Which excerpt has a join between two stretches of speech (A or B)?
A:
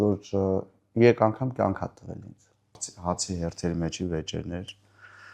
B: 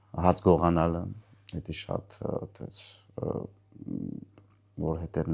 A